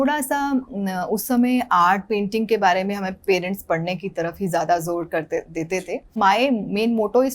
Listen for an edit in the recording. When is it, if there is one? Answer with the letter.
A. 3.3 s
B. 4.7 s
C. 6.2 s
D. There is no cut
C